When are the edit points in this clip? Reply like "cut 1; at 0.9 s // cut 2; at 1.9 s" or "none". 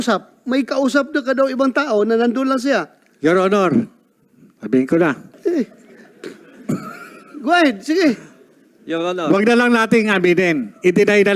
cut 1; at 5.3 s

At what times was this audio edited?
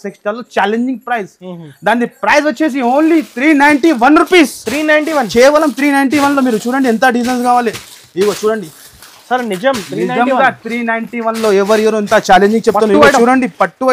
none

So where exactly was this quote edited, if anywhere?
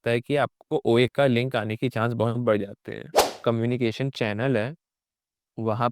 cut 1; at 3.3 s

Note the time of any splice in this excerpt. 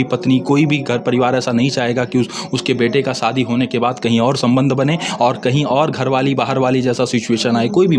none

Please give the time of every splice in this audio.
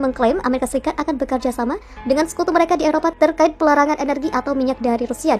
cut 1; at 3.1 s

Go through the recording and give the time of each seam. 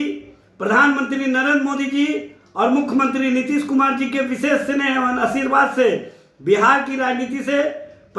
none

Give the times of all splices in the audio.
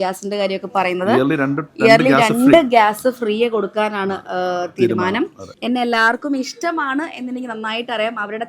cut 1; at 5.5 s

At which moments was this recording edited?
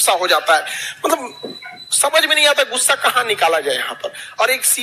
none

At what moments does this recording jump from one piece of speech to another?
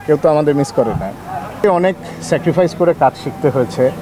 cut 1; at 1.6 s

